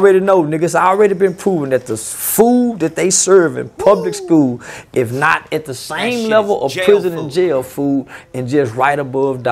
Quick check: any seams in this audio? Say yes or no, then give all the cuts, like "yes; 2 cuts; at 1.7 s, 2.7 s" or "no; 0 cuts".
no; 0 cuts